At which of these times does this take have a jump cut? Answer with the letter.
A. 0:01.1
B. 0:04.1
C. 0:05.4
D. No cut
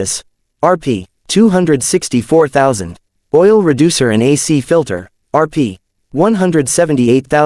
A